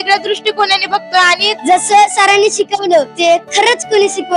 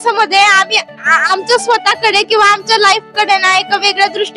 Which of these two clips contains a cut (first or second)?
first